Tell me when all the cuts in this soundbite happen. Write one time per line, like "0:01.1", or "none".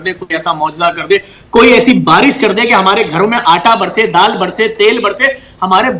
none